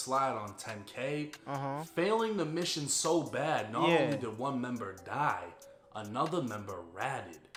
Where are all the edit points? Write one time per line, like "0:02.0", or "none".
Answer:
none